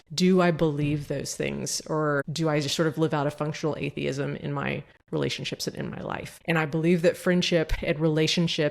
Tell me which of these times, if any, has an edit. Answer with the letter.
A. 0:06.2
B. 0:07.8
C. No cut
B